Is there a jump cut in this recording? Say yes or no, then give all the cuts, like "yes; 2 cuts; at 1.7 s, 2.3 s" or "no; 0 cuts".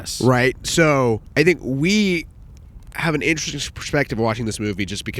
yes; 1 cut; at 1.3 s